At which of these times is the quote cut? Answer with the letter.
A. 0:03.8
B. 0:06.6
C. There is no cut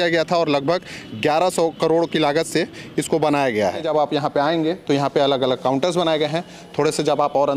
A